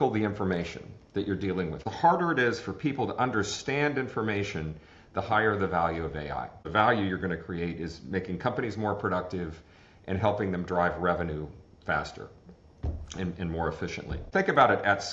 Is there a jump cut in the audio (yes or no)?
yes